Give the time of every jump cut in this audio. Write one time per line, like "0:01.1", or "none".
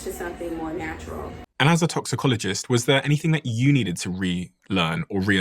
0:01.5